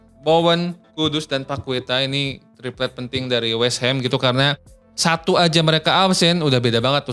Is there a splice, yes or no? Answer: no